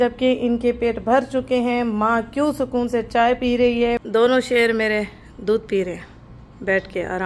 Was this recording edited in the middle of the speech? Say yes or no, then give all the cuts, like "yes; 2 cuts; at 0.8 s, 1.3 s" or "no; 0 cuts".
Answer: no; 0 cuts